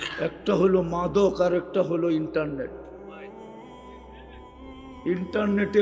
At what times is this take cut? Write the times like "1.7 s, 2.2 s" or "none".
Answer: none